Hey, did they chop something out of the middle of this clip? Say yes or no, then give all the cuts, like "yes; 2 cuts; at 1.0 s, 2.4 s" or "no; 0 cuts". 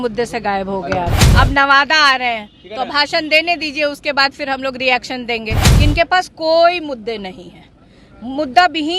yes; 2 cuts; at 1.2 s, 5.6 s